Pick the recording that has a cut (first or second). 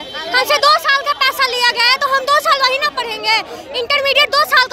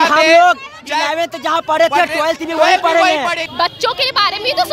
second